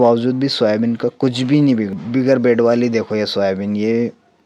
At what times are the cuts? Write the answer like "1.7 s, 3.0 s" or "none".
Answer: 2.0 s